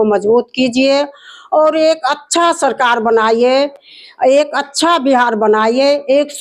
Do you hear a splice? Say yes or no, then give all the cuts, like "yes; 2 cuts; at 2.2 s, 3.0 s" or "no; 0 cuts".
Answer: no; 0 cuts